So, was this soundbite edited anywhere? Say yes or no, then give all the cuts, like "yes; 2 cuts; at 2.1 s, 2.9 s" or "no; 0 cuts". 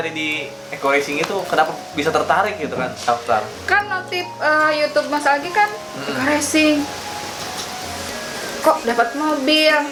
no; 0 cuts